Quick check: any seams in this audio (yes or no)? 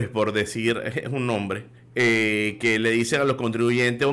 yes